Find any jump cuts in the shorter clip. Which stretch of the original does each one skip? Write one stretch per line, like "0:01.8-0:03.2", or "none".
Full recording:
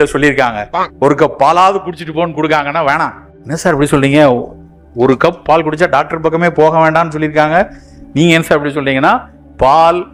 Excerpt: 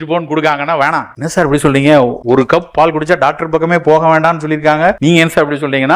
0:03.2-0:03.4
0:04.5-0:04.9
0:07.7-0:08.1